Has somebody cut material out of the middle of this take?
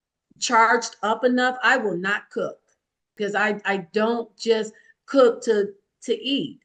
yes; 1 cut; at 3.1 s

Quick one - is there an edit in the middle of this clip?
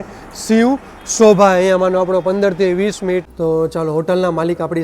yes; 1 cut; at 3.3 s

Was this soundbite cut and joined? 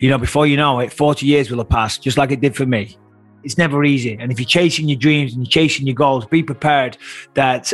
yes; 1 cut; at 3.1 s

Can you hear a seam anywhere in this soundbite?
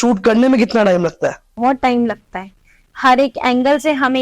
no; 0 cuts

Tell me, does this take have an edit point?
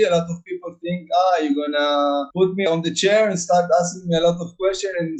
no; 0 cuts

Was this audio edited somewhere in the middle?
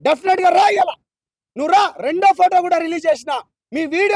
no; 0 cuts

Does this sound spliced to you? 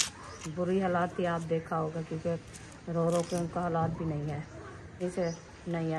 yes; 1 cut; at 5.0 s

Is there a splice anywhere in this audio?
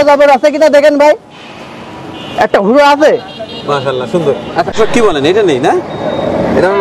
yes; 1 cut; at 4.7 s

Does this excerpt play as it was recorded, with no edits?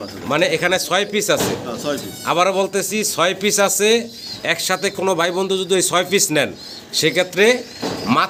yes; 0 cuts

